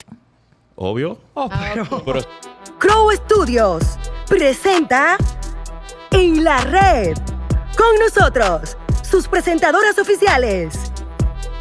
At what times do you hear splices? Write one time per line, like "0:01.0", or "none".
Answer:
0:02.3